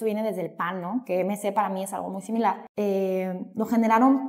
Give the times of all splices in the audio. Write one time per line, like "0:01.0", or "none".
0:02.7